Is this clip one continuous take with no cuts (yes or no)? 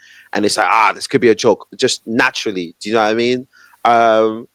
yes